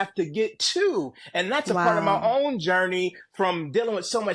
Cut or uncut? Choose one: uncut